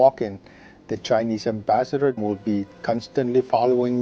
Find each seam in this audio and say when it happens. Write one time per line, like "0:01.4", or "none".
0:02.2

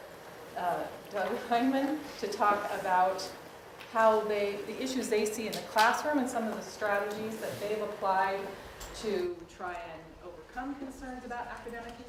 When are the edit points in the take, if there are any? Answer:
none

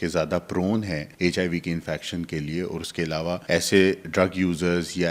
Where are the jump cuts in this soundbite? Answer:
0:01.1
0:03.4

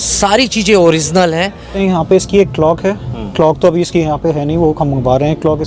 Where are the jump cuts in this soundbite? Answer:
0:01.7

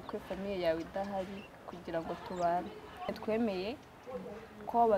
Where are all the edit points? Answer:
0:03.1

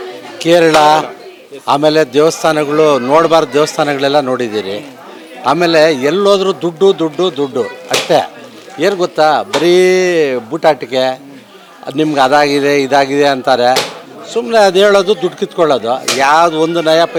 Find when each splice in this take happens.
none

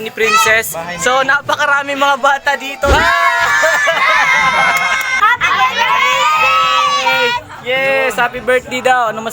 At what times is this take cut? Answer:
0:02.9
0:05.1

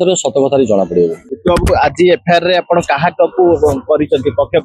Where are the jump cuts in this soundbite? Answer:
none

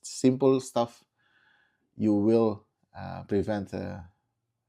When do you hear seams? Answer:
none

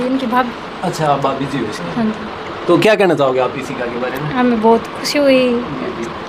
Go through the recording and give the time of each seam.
none

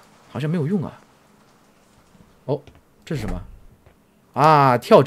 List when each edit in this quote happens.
none

